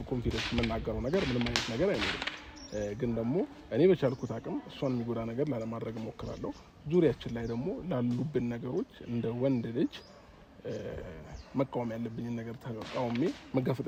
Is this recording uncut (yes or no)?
yes